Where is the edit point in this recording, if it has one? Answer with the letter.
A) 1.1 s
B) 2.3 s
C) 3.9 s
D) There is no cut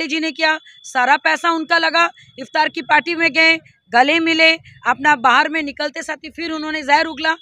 D